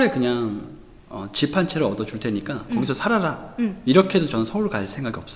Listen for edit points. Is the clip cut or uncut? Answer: uncut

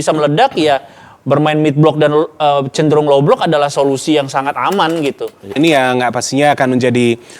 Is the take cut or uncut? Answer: cut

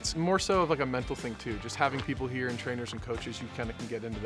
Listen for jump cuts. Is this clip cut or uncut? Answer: uncut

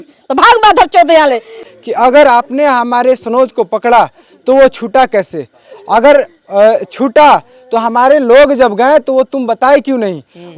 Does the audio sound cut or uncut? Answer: cut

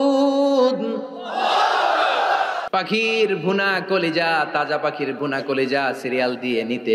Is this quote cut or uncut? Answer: cut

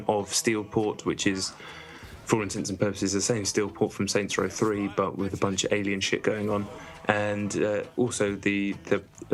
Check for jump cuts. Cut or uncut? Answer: uncut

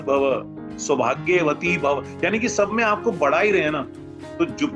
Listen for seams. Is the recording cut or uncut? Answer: uncut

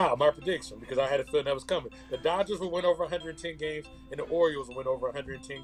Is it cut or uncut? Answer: uncut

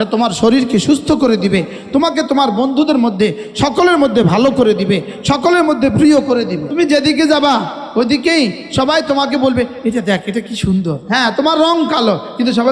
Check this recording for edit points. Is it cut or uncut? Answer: cut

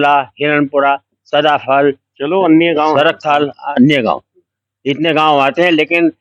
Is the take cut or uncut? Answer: uncut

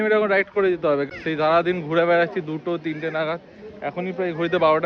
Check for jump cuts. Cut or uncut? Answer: cut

